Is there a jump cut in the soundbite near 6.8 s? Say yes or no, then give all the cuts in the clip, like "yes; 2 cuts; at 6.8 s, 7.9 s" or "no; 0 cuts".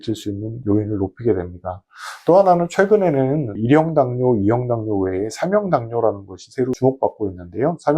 yes; 1 cut; at 6.8 s